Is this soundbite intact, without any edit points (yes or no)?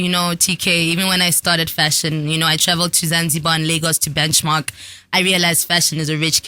yes